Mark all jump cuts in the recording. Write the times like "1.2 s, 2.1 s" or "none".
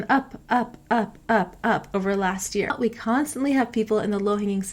2.7 s